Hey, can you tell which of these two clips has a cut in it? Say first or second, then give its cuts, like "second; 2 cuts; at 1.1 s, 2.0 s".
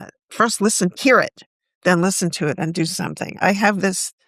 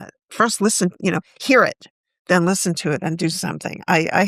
first; 2 cuts; at 1.0 s, 3.4 s